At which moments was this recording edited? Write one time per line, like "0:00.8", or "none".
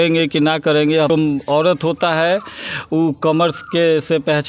0:01.1